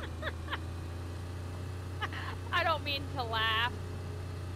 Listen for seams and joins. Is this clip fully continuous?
yes; 0 cuts

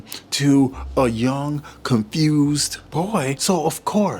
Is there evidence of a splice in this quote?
yes; 1 cut; at 3.1 s

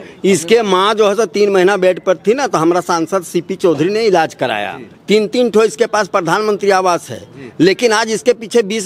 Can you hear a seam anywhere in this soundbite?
no; 0 cuts

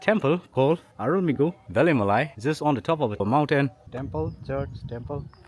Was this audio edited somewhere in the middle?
yes; 2 cuts; at 2.3 s, 3.8 s

